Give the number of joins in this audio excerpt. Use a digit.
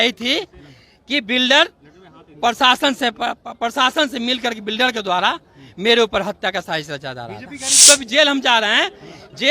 1